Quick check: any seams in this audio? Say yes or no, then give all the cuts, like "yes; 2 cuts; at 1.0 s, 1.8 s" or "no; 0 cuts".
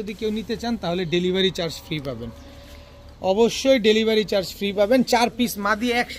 no; 0 cuts